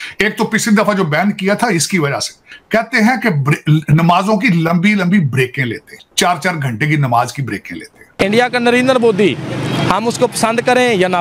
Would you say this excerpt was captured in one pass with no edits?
no; 3 cuts; at 2.5 s, 6.0 s, 8.0 s

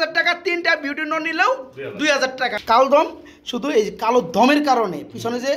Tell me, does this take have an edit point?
yes; 1 cut; at 2.6 s

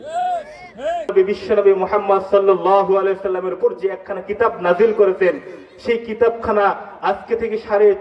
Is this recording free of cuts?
no; 1 cut; at 1.1 s

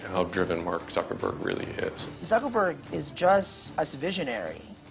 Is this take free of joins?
no; 2 cuts; at 2.1 s, 3.6 s

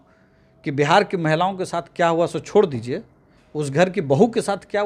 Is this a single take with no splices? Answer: yes; 0 cuts

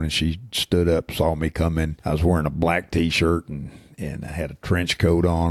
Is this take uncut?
no; 1 cut; at 2.0 s

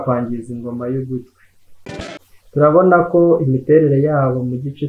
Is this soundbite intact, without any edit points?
no; 1 cut; at 1.9 s

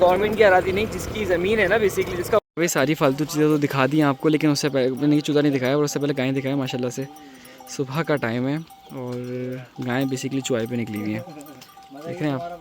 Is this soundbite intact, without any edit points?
no; 1 cut; at 2.5 s

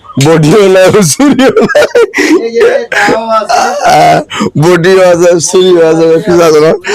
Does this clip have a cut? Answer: no; 0 cuts

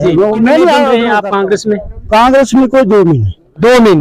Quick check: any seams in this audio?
yes; 1 cut; at 1.0 s

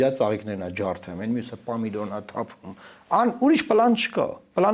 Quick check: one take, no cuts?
yes; 0 cuts

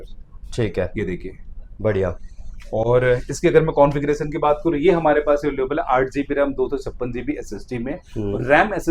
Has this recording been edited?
no; 0 cuts

